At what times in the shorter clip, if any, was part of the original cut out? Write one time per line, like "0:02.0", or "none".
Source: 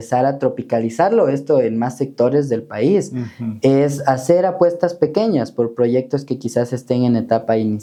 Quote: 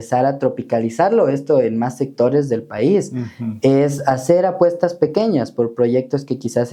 none

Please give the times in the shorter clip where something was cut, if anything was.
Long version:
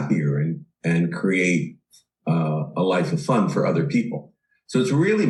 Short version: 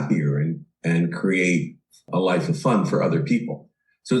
0:02.0

